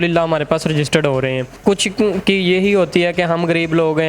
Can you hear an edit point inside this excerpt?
yes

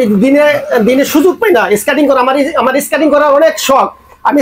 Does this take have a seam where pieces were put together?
no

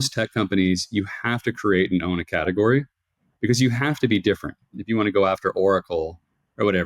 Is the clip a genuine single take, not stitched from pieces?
no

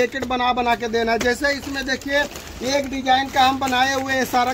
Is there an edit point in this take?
no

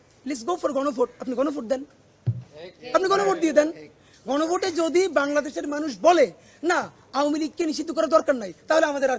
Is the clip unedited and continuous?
yes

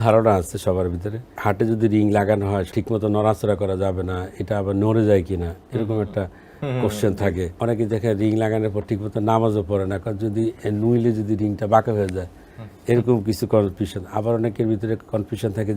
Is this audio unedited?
no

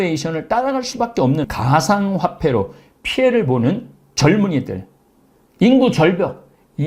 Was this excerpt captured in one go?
no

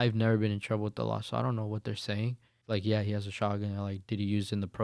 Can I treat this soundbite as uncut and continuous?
no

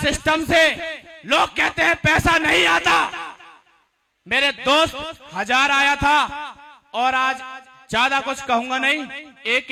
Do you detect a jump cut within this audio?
no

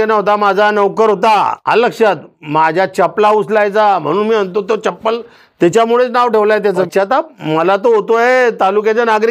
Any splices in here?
yes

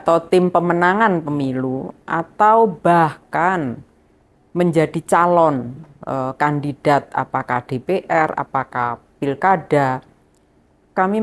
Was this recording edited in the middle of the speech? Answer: no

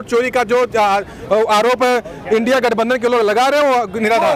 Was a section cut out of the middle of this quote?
no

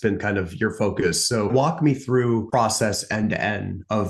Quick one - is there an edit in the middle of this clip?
yes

